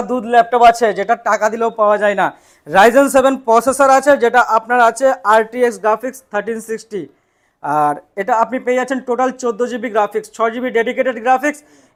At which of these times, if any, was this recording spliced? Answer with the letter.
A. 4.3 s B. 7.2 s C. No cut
C